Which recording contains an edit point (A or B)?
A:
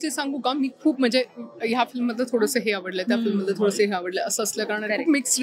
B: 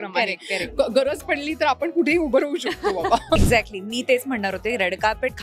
B